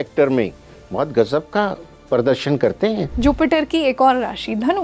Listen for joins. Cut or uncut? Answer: cut